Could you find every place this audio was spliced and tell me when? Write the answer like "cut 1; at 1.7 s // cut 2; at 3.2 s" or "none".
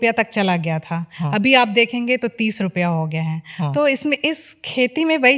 none